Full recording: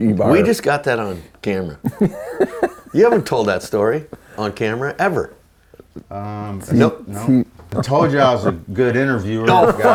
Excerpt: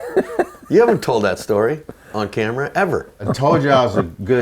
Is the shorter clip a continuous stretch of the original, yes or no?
no